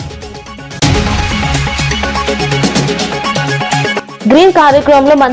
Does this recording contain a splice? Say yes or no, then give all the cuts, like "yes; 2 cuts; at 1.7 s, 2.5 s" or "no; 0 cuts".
yes; 2 cuts; at 0.8 s, 4.1 s